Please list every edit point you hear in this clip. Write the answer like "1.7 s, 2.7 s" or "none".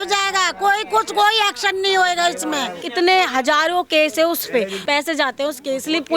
2.8 s, 4.8 s